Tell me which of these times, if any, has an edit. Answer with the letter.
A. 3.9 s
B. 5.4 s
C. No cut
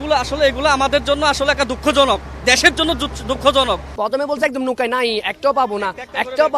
A